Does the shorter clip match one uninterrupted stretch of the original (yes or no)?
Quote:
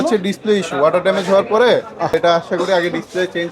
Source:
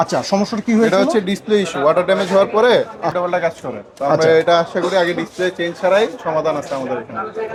no